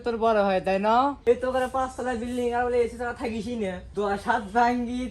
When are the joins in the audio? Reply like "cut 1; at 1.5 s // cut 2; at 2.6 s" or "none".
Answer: cut 1; at 1.2 s // cut 2; at 3.8 s

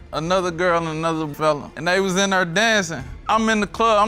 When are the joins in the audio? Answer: cut 1; at 1.5 s // cut 2; at 3.2 s

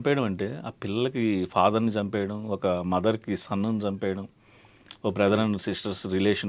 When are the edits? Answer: none

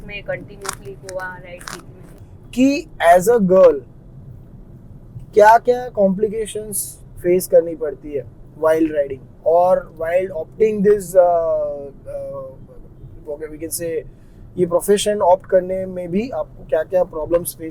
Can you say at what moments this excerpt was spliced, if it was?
cut 1; at 2.2 s

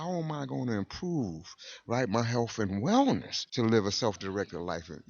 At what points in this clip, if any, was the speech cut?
cut 1; at 3.4 s

